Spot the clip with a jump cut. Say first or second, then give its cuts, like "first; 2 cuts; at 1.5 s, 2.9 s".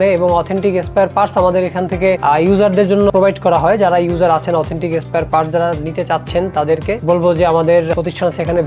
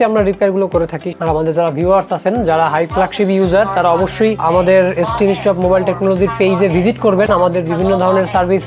second; 1 cut; at 1.2 s